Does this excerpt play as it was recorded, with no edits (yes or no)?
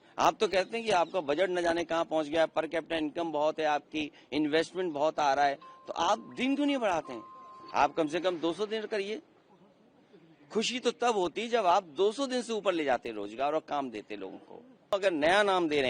no